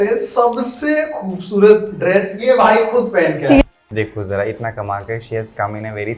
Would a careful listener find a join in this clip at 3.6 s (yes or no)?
yes